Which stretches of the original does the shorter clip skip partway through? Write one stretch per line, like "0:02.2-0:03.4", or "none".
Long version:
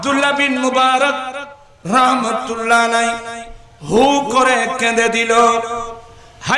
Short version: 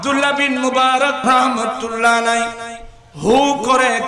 0:01.2-0:01.8